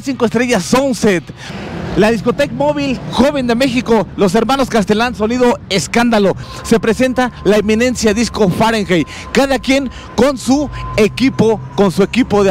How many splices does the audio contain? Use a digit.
2